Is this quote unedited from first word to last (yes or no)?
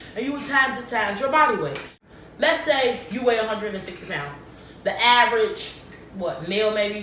no